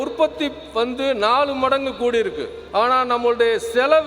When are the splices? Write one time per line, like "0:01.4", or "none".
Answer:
0:02.5